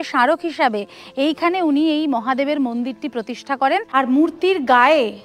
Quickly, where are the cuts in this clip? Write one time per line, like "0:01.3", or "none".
0:03.9